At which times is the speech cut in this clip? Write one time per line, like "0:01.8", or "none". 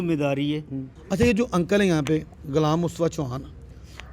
0:01.0